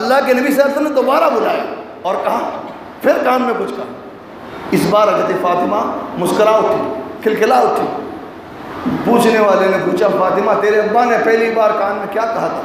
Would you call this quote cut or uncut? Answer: uncut